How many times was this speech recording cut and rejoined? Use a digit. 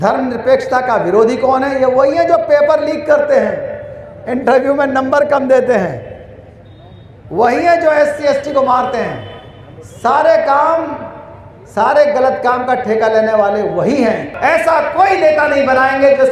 1